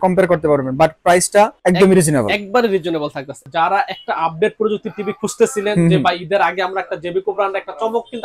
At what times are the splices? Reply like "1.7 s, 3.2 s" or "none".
1.6 s, 3.4 s

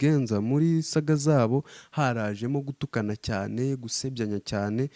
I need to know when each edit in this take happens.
none

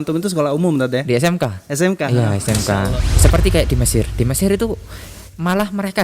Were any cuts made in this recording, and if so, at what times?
3.1 s

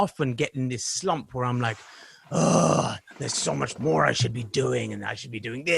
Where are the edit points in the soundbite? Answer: none

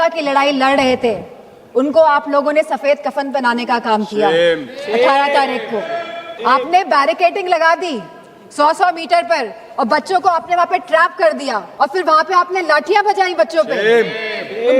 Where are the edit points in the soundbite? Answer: 6.3 s, 11.7 s

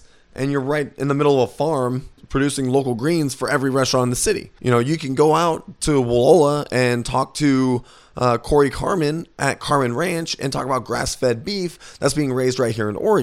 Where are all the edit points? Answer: 2.2 s, 4.5 s

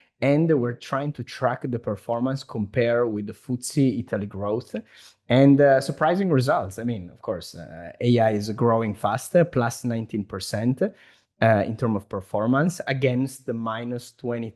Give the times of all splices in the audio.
none

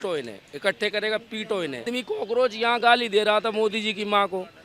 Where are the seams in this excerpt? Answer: 2.0 s

